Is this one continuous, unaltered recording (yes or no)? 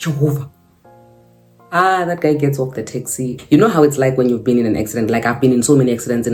yes